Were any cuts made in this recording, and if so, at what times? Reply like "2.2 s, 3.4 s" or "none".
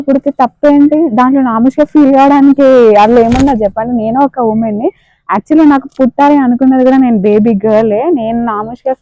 none